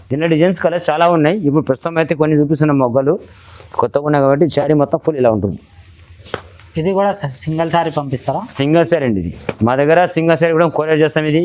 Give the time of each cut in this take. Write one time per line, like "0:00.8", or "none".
none